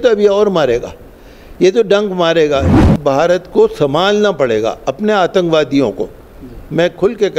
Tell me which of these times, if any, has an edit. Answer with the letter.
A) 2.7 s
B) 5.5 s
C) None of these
A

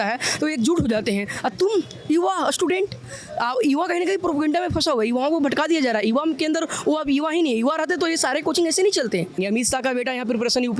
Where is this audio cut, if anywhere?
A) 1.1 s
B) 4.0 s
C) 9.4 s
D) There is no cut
C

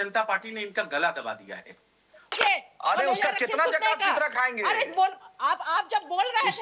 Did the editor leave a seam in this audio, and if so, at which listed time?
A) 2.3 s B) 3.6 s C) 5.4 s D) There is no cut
A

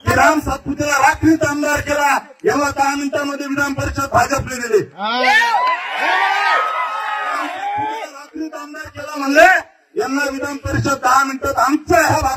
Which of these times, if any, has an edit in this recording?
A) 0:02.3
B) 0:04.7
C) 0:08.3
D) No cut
D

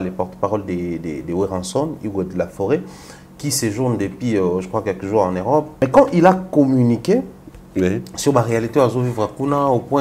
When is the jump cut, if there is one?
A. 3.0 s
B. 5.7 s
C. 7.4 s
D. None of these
B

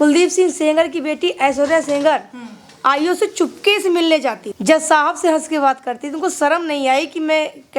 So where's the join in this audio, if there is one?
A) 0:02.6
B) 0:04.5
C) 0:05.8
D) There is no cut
B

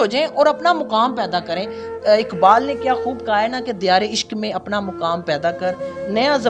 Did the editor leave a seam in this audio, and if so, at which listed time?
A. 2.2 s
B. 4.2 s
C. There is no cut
C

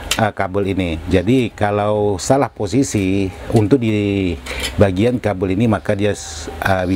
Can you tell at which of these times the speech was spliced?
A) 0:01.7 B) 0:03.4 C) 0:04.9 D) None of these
D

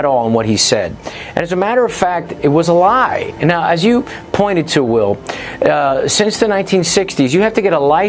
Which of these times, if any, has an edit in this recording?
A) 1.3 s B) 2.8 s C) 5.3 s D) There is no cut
A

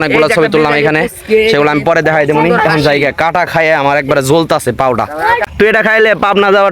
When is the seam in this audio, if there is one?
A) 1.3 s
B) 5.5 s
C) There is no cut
B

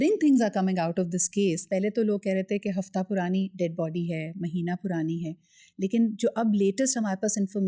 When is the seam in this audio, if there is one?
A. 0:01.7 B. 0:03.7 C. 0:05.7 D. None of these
A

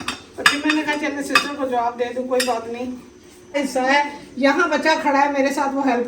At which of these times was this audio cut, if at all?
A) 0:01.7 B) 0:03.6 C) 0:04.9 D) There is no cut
B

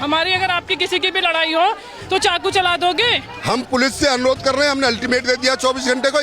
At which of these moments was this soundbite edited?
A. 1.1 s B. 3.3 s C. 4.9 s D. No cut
B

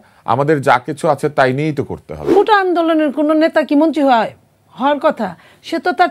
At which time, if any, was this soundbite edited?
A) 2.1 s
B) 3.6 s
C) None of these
A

